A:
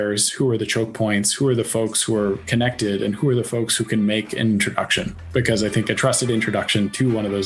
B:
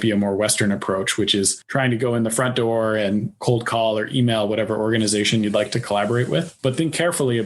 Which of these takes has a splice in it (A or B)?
B